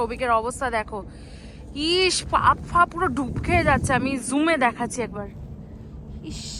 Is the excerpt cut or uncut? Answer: uncut